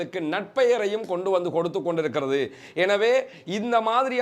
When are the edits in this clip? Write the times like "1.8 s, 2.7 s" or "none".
none

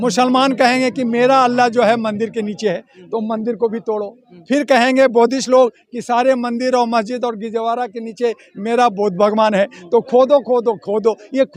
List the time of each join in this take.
none

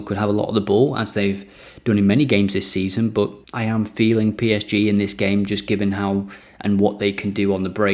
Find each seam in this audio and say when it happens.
3.4 s

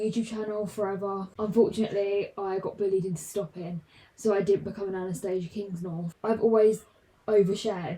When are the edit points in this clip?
1.3 s, 6.1 s

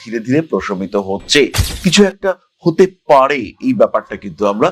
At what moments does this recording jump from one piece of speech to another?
1.6 s

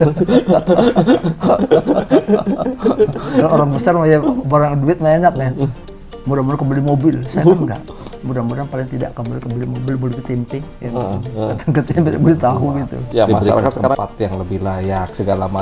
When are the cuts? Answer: 14.0 s

